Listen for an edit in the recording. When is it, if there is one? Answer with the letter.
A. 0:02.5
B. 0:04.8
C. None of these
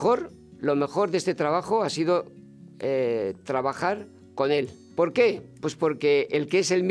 B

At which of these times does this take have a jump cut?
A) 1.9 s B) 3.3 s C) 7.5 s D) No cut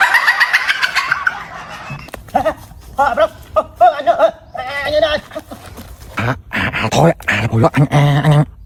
D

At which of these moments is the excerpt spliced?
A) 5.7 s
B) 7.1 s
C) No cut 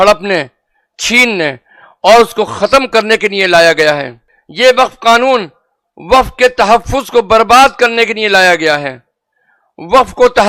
C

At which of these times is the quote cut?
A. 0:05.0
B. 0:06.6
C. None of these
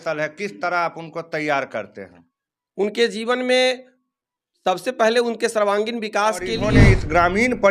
B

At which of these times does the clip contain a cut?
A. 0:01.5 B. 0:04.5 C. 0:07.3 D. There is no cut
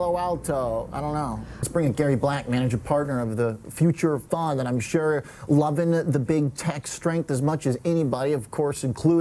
A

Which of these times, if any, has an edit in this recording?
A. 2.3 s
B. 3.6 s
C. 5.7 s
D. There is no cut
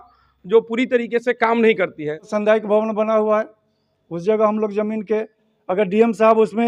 A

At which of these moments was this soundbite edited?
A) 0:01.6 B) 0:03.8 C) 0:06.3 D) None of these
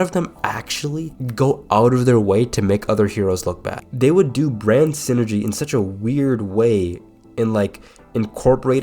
B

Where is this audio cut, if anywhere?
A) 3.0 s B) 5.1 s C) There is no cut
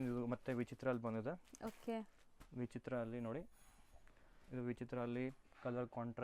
C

